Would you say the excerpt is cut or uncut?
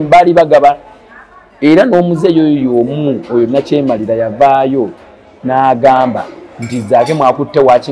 uncut